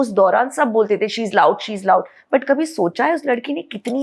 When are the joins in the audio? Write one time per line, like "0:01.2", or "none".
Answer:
none